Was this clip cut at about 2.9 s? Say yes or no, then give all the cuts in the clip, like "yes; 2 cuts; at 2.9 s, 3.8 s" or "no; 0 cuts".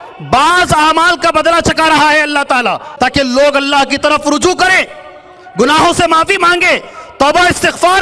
yes; 1 cut; at 2.9 s